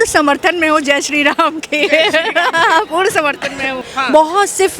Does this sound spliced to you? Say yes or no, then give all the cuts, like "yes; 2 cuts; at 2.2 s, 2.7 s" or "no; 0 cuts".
yes; 1 cut; at 3.8 s